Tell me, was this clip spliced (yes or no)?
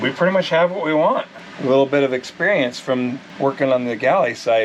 yes